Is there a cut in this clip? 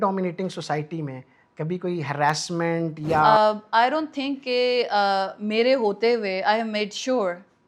yes; 1 cut; at 3.2 s

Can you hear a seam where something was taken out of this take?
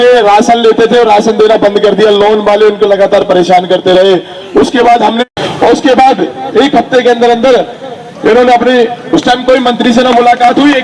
yes; 1 cut; at 5.2 s

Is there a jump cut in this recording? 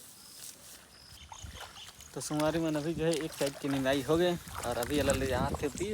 yes; 1 cut; at 1.1 s

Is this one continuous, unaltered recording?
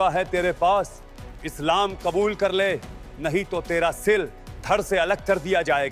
yes; 0 cuts

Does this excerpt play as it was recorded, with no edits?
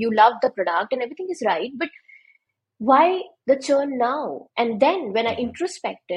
yes; 0 cuts

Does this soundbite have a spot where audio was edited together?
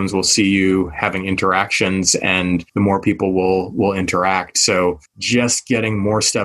yes; 2 cuts; at 2.7 s, 5.1 s

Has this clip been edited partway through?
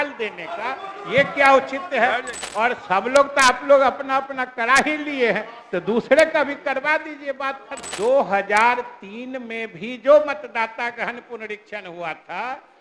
yes; 2 cuts; at 2.4 s, 7.9 s

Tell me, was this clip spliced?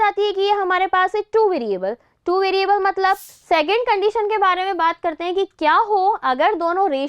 yes; 1 cut; at 3.3 s

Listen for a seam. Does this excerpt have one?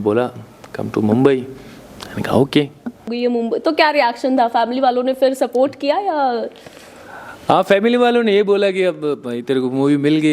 yes; 1 cut; at 3.1 s

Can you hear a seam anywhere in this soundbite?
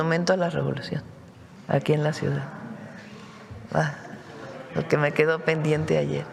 no; 0 cuts

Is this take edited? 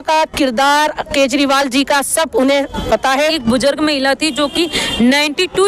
yes; 1 cut; at 3.4 s

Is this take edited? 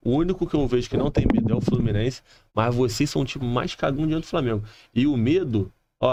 no; 0 cuts

